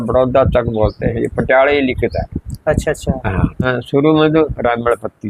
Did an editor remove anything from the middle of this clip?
yes; 1 cut; at 3.7 s

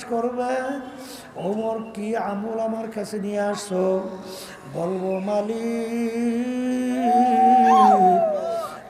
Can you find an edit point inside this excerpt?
no; 0 cuts

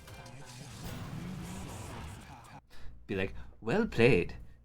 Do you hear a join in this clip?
yes; 1 cut; at 2.6 s

